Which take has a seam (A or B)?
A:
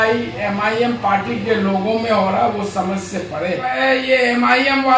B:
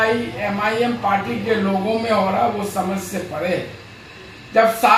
A